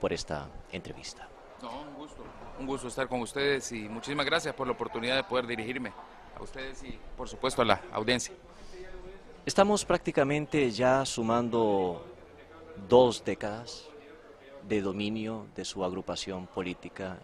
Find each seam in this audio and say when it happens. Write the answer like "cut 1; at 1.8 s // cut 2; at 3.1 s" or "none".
none